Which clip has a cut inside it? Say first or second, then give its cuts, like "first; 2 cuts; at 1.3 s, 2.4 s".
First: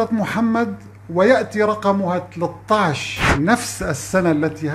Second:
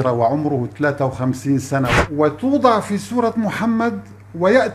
second; 1 cut; at 2.0 s